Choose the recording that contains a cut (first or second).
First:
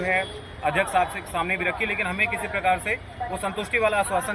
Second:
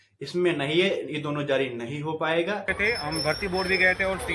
second